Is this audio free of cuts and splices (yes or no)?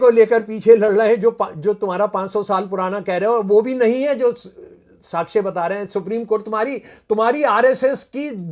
yes